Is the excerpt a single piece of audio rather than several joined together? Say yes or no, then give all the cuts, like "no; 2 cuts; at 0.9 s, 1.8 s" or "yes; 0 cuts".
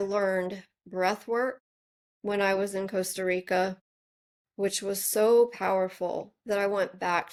yes; 0 cuts